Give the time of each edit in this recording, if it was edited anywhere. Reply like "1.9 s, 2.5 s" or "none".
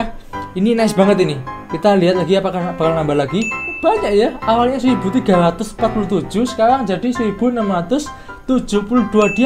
3.8 s